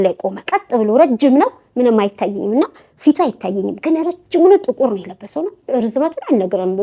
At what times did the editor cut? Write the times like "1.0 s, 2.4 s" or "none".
none